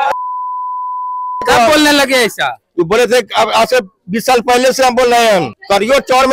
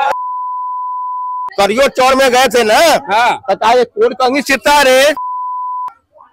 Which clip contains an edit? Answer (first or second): second